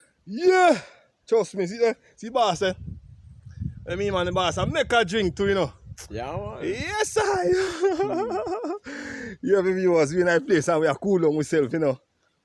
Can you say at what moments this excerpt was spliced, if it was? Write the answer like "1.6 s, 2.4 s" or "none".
none